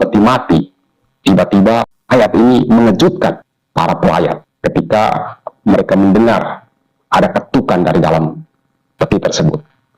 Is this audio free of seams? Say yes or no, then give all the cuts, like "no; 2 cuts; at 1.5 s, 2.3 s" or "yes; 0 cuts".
no; 3 cuts; at 1.9 s, 3.5 s, 4.5 s